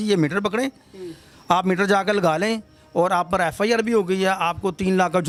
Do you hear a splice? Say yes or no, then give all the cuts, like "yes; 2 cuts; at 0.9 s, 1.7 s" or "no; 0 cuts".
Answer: no; 0 cuts